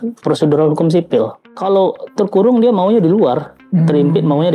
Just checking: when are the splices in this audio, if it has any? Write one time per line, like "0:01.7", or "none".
0:01.5